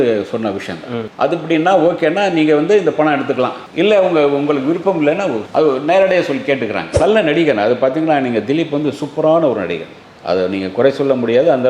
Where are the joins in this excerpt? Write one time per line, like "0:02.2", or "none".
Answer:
0:07.0